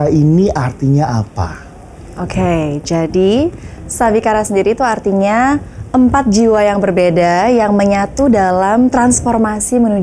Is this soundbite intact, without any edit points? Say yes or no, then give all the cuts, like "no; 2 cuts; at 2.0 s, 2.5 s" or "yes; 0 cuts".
yes; 0 cuts